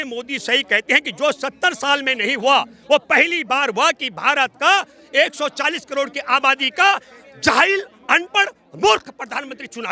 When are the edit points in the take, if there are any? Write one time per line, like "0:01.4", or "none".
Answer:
none